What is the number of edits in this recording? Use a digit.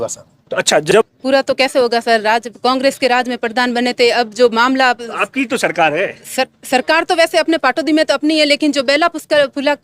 1